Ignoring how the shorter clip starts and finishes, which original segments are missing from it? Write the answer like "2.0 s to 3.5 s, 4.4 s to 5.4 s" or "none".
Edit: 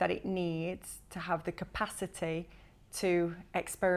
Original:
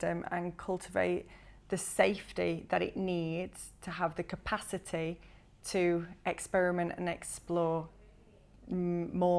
none